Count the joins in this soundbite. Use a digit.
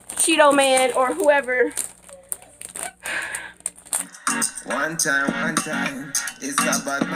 1